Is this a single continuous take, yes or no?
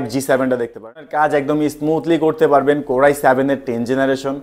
no